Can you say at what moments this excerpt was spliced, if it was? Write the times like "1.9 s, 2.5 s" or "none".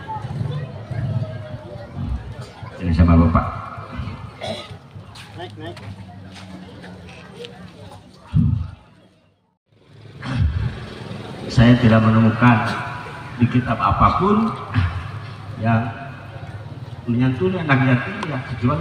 9.8 s